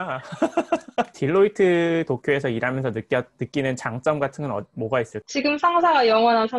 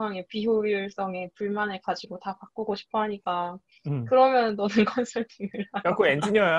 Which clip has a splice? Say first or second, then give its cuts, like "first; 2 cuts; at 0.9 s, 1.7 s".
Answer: first; 2 cuts; at 1.1 s, 5.2 s